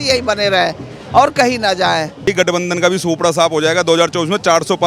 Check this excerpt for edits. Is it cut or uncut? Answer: cut